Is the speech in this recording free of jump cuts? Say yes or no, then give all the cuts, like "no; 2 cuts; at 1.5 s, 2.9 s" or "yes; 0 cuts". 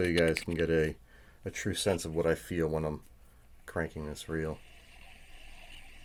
yes; 0 cuts